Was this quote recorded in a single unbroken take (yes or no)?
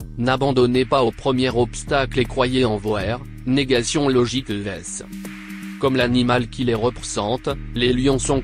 yes